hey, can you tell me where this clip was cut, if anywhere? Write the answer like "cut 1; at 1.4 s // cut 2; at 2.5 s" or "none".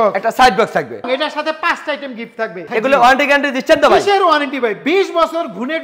cut 1; at 1.1 s // cut 2; at 2.6 s